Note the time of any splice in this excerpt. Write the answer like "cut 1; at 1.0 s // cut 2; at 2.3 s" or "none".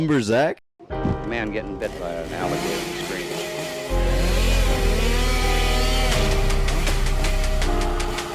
cut 1; at 0.9 s